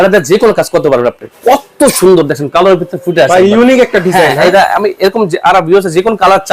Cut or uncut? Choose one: cut